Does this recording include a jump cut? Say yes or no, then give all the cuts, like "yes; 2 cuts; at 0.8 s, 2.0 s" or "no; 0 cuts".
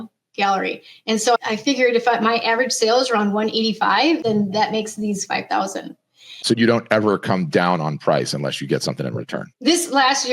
yes; 2 cuts; at 4.2 s, 6.4 s